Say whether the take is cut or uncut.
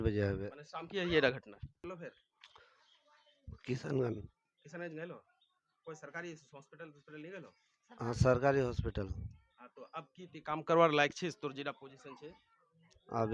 cut